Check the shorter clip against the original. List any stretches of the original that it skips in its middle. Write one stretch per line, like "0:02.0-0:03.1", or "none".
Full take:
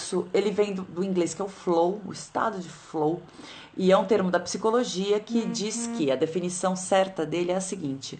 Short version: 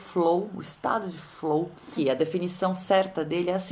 0:03.4-0:05.9